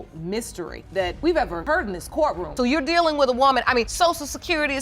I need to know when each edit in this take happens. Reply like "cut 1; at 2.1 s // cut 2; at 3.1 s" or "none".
cut 1; at 2.4 s